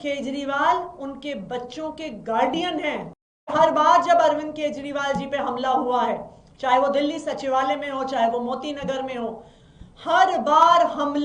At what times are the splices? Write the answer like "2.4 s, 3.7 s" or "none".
3.5 s